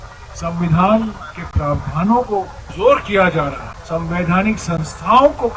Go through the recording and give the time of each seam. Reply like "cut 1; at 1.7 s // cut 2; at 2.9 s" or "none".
cut 1; at 2.6 s // cut 2; at 3.7 s